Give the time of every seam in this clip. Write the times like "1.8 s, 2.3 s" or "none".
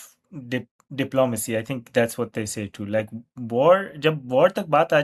none

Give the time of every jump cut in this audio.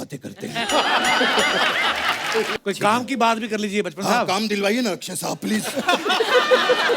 2.6 s

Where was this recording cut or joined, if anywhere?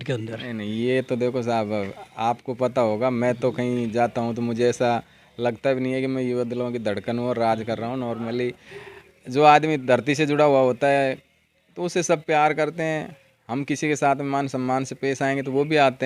none

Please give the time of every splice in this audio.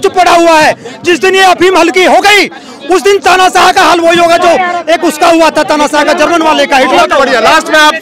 none

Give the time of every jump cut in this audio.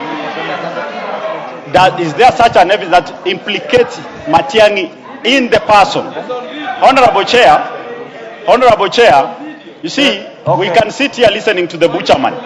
none

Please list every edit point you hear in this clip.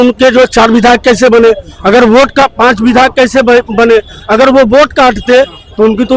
none

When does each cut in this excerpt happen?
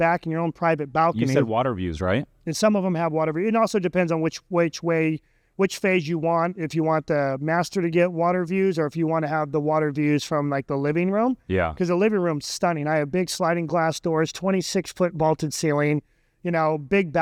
none

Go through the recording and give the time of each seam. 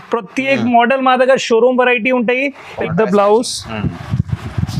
2.8 s

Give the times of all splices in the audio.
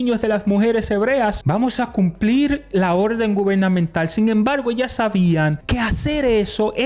1.4 s, 5.6 s

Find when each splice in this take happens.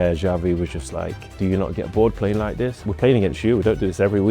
1.4 s, 2.8 s

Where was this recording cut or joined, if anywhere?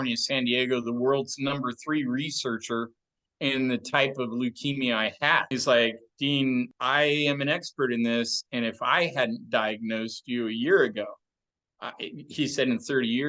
5.5 s, 6.8 s

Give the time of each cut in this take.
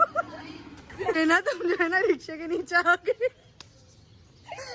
1.2 s

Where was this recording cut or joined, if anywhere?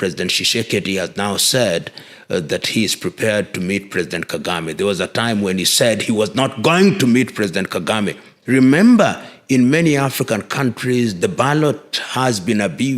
8.3 s

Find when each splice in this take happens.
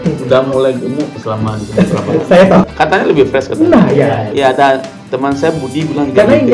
2.7 s, 4.3 s

